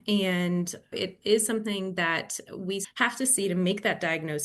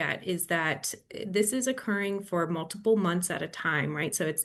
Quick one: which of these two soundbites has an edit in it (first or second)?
first